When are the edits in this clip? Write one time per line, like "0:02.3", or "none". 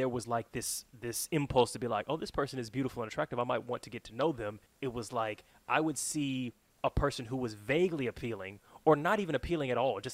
0:04.6
0:06.6

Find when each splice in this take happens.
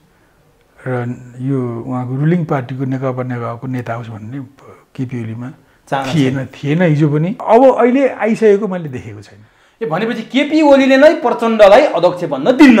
0:07.4

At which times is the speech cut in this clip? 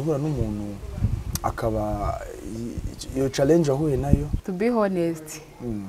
0:04.4

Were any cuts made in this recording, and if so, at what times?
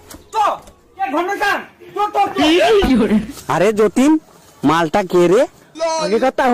0:03.4

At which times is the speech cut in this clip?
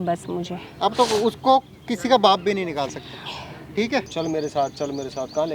0:04.1

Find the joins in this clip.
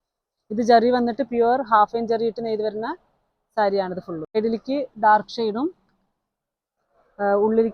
0:04.4

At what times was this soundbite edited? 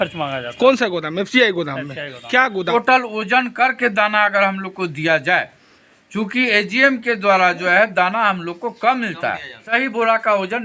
0:02.6
0:09.7

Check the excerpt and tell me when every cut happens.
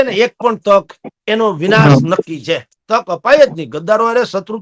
none

